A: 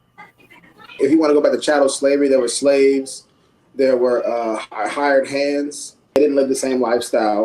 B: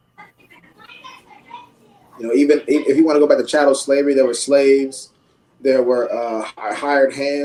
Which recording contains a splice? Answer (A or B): A